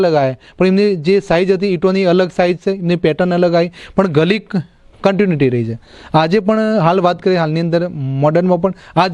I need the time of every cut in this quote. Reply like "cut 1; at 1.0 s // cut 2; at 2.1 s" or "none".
none